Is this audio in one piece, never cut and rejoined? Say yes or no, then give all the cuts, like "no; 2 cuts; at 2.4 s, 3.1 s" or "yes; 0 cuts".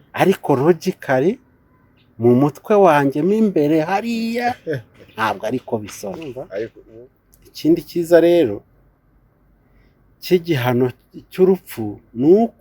no; 1 cut; at 6.8 s